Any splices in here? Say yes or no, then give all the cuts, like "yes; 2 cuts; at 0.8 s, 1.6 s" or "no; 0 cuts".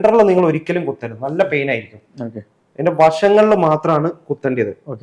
no; 0 cuts